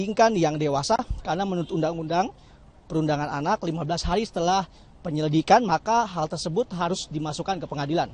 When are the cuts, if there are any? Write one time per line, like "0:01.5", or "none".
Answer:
0:02.2